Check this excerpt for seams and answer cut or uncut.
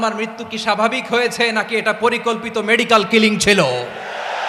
uncut